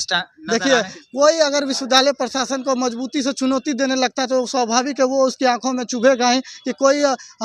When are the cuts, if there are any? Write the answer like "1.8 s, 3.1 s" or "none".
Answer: none